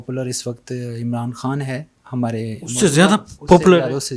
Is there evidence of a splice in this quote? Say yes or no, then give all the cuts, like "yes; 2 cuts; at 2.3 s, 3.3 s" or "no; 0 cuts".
no; 0 cuts